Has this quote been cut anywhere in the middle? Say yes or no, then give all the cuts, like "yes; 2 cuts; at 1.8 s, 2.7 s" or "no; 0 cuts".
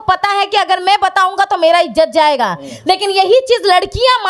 no; 0 cuts